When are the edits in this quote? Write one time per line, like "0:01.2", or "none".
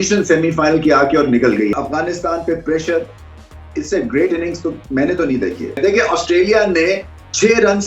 0:01.7
0:05.8